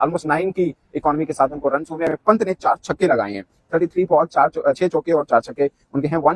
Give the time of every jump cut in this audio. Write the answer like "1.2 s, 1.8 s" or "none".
2.1 s